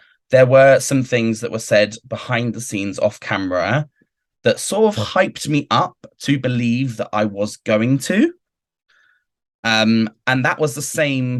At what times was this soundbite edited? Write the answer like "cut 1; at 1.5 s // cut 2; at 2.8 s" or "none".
none